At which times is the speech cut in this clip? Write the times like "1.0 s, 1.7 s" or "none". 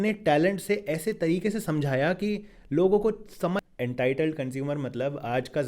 3.6 s

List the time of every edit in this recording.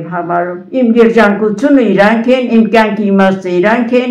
none

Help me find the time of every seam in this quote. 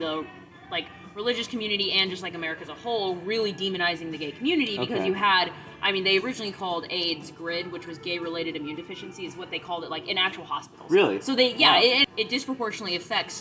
12.0 s

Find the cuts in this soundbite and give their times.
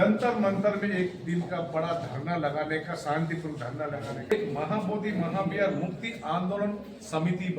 4.3 s

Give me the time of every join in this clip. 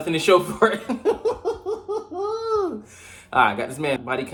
none

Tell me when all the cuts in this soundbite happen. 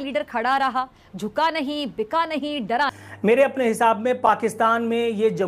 3.0 s

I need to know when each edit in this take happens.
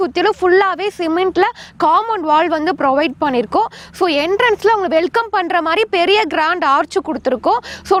none

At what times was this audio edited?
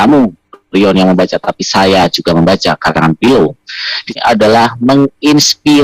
4.2 s

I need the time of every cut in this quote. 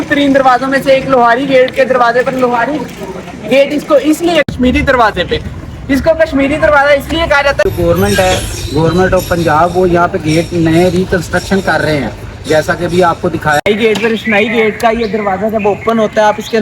4.5 s, 7.7 s, 13.6 s

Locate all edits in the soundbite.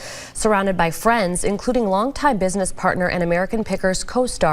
1.3 s

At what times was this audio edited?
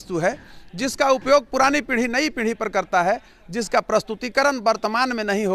none

